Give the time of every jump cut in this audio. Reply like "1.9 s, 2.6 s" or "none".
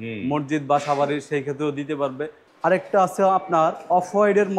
2.4 s